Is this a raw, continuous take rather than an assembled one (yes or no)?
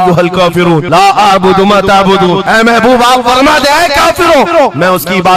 yes